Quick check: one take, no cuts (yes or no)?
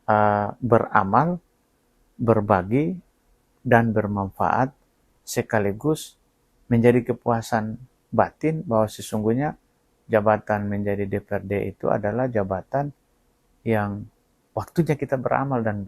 yes